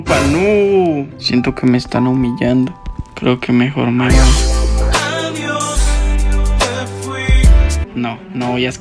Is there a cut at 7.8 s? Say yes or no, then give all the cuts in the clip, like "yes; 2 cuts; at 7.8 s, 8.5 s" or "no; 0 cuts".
yes; 2 cuts; at 1.1 s, 7.8 s